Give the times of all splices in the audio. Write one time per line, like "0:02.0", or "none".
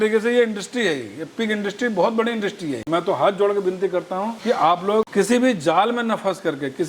0:02.8
0:04.3
0:05.1